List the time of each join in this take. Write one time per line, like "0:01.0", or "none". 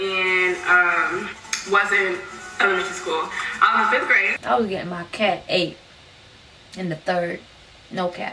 0:04.3